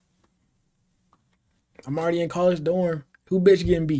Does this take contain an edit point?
yes; 1 cut; at 3.1 s

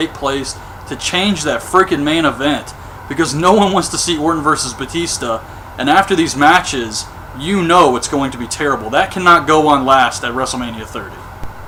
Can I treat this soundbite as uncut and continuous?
yes; 0 cuts

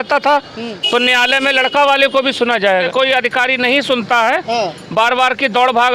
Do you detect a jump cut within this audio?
yes; 1 cut; at 2.9 s

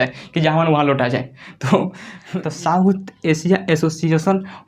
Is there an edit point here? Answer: yes; 1 cut; at 2.1 s

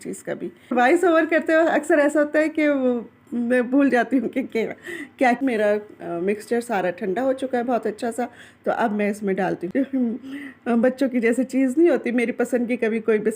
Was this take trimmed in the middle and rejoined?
yes; 3 cuts; at 0.7 s, 5.4 s, 9.7 s

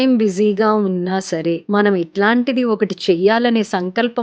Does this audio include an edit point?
yes; 1 cut; at 1.6 s

